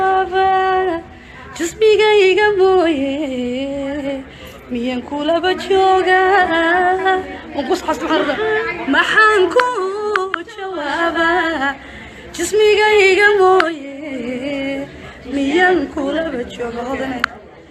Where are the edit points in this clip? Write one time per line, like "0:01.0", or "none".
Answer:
0:11.1